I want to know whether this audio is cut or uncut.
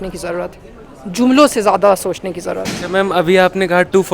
uncut